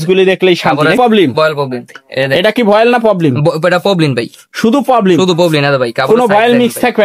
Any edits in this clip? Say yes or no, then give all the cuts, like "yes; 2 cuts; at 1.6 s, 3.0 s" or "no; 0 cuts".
yes; 1 cut; at 1.0 s